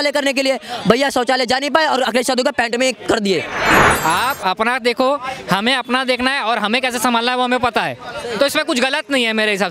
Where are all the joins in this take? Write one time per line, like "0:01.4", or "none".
0:03.8